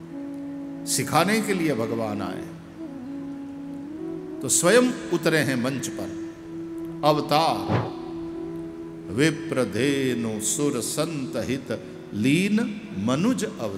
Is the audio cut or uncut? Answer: cut